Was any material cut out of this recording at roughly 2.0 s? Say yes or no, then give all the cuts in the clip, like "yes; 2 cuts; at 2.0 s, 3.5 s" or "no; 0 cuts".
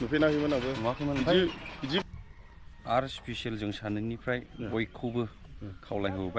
yes; 1 cut; at 2.0 s